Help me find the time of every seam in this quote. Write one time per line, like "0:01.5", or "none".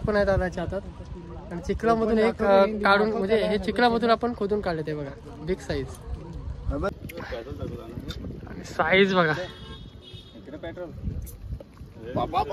none